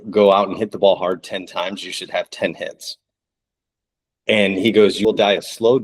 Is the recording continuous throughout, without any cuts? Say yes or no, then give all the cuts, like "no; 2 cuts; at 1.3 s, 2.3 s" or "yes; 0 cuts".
no; 2 cuts; at 2.3 s, 5.0 s